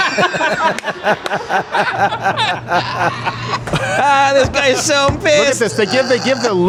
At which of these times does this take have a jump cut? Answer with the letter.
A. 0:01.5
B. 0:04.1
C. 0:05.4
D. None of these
D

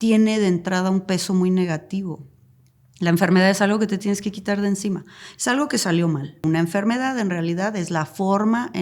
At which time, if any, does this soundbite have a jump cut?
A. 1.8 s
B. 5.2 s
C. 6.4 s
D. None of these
C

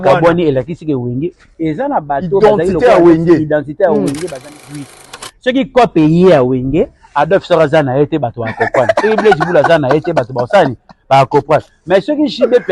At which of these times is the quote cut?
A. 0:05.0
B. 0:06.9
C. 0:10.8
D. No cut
A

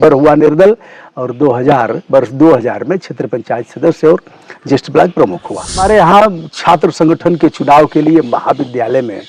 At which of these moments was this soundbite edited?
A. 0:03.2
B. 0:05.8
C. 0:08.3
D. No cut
B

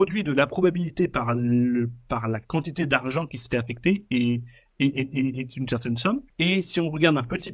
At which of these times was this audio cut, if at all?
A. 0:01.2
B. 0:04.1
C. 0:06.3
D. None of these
C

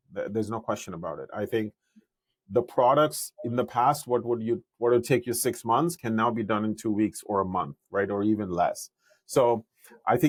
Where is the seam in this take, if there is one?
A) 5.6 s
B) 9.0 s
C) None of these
C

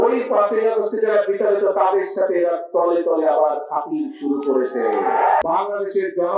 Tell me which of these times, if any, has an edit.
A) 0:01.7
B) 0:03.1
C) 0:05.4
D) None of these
C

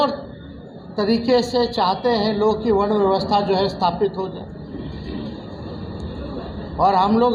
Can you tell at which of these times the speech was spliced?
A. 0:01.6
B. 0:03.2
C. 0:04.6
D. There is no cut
D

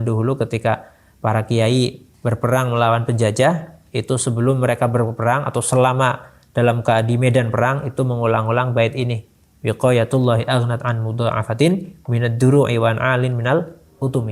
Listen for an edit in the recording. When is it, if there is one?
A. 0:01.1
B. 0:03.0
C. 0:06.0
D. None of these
D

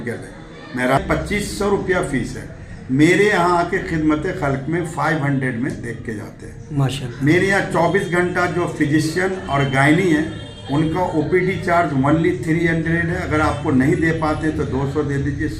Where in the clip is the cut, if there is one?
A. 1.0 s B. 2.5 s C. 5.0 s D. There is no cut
A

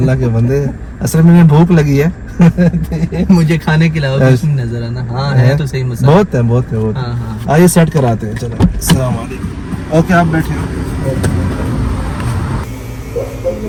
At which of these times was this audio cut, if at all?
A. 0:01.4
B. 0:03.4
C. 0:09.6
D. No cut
D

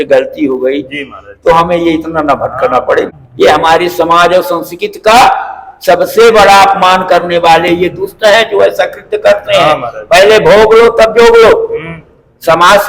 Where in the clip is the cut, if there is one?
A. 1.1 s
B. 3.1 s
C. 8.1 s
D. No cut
B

